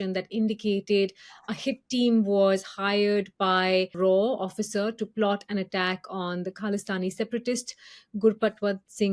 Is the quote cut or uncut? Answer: cut